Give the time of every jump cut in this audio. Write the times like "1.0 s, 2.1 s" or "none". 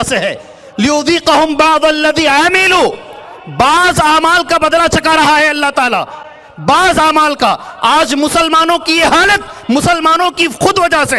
none